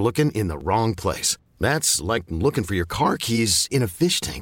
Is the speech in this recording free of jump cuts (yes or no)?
yes